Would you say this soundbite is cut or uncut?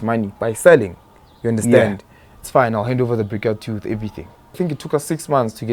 cut